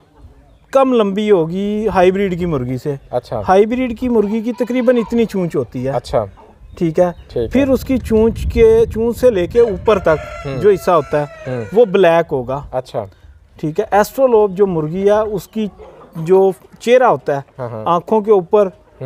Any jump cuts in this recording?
no; 0 cuts

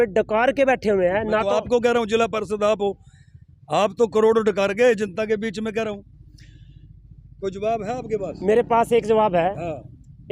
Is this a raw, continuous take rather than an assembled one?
yes; 0 cuts

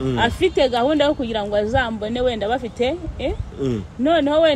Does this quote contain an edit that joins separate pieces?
no; 0 cuts

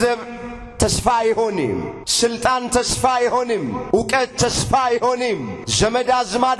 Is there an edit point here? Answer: yes; 3 cuts; at 2.0 s, 3.8 s, 5.6 s

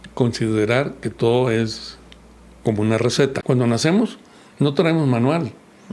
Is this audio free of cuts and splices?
no; 1 cut; at 3.4 s

